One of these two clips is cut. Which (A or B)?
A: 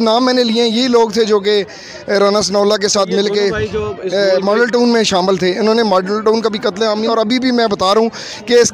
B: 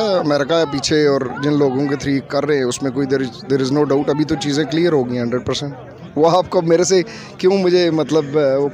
A